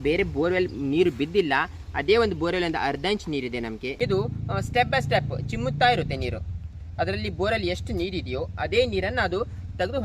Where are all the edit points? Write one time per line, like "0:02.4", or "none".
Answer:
0:03.9